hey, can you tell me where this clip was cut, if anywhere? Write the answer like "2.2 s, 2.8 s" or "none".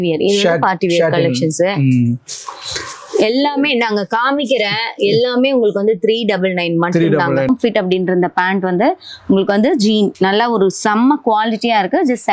7.5 s